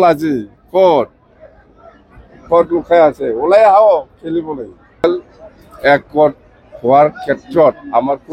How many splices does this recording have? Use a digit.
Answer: 1